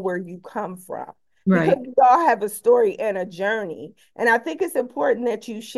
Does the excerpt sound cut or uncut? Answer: uncut